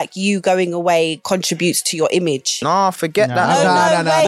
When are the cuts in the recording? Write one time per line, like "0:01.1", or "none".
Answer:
0:01.2
0:02.6